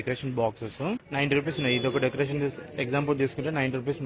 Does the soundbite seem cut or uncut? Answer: cut